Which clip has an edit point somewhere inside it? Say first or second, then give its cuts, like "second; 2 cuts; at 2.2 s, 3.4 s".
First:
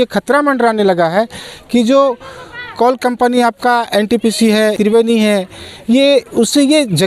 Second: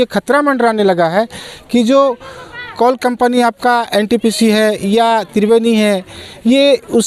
first; 1 cut; at 4.8 s